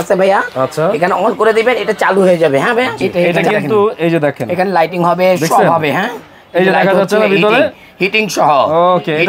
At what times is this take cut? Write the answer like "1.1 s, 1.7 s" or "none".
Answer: 3.1 s